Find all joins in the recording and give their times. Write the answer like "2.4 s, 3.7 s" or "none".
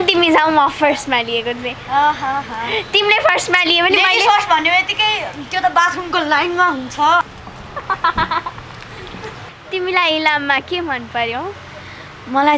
7.3 s, 9.4 s